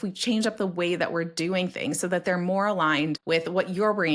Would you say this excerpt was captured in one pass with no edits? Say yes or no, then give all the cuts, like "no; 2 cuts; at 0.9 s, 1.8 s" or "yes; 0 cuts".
no; 1 cut; at 3.2 s